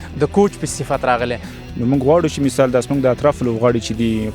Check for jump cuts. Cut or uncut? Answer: cut